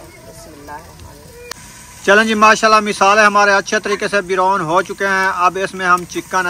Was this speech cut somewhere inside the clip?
yes; 1 cut; at 1.5 s

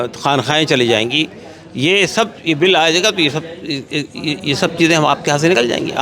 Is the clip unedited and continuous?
yes; 0 cuts

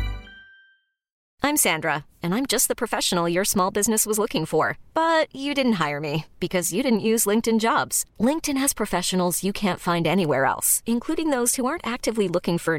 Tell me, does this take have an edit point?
yes; 1 cut; at 1.2 s

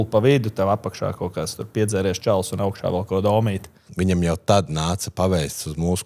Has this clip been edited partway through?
yes; 1 cut; at 3.9 s

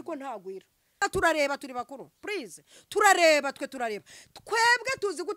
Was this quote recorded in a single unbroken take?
no; 1 cut; at 1.0 s

